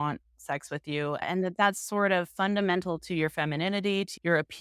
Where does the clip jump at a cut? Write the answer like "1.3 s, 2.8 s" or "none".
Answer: 1.3 s